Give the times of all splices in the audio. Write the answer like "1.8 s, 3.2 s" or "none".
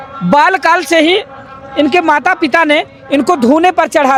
none